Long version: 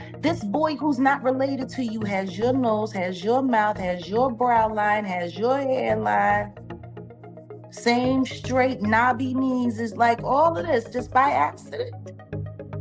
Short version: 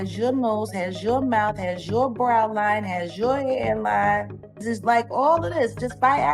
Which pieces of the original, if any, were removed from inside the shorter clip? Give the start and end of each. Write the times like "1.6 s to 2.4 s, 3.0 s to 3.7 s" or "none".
6.8 s to 9.8 s